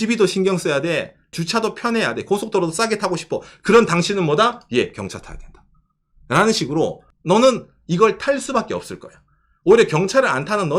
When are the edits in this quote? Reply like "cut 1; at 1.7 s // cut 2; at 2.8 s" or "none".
cut 1; at 1.4 s // cut 2; at 7.1 s